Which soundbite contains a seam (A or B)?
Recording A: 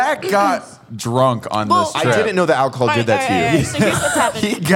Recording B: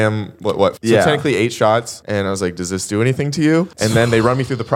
B